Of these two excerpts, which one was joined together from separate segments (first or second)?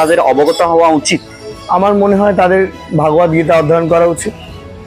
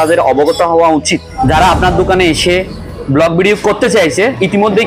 second